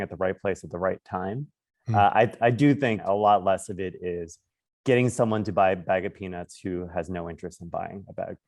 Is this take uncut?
no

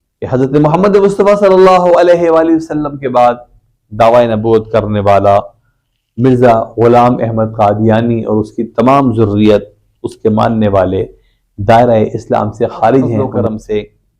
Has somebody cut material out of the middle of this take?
yes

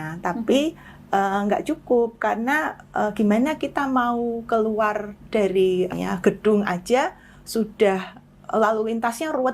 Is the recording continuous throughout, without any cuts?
no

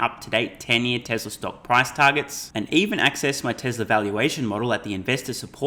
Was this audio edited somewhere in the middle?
no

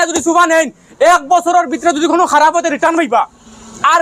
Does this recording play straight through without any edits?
yes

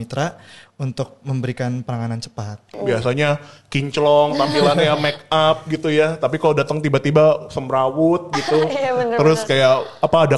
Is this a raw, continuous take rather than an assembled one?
no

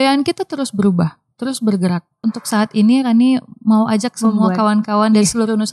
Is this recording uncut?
no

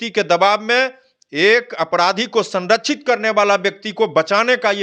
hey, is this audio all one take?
yes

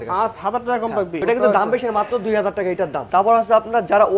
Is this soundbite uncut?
no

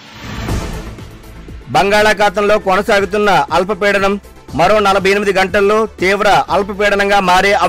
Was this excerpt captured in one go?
yes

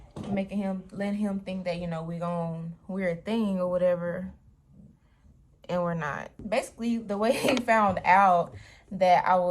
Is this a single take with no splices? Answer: no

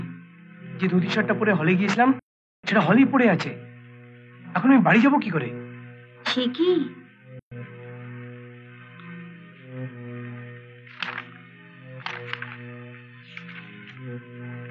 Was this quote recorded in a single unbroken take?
yes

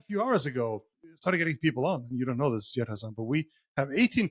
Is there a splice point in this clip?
yes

